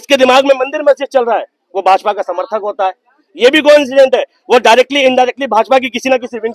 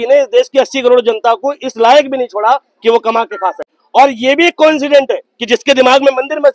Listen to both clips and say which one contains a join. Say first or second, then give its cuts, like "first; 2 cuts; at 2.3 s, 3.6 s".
second; 1 cut; at 3.7 s